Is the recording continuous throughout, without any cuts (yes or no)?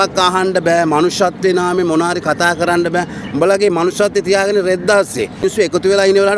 no